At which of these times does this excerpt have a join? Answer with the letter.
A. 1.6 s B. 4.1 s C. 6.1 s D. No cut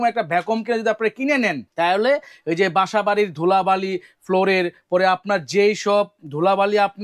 A